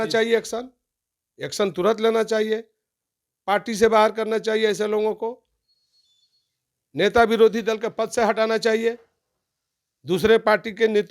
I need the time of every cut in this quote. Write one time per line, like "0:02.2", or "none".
none